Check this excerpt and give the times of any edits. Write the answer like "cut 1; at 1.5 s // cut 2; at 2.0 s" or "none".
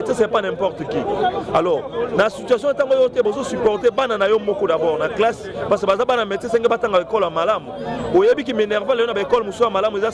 none